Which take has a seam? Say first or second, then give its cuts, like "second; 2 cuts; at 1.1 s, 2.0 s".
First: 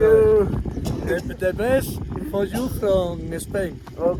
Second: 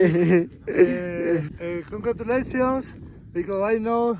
second; 1 cut; at 1.6 s